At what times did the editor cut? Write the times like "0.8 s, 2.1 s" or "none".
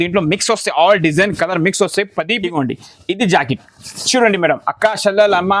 2.3 s